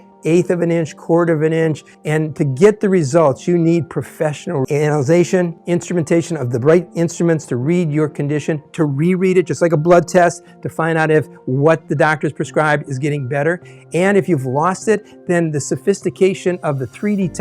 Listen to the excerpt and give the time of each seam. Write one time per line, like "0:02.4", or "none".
0:01.9